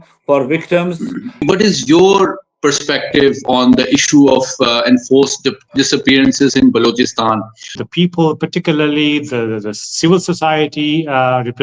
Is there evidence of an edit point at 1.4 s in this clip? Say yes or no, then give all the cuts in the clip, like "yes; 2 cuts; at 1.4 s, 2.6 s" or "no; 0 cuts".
yes; 2 cuts; at 1.4 s, 7.8 s